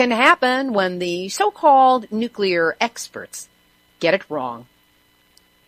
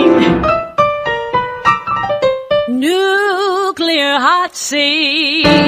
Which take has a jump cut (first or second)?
second